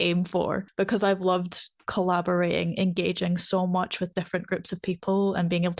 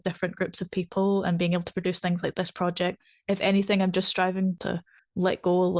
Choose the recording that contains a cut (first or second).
second